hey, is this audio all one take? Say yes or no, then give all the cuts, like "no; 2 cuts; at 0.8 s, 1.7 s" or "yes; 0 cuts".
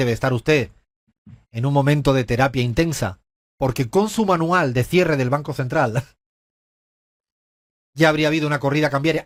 yes; 0 cuts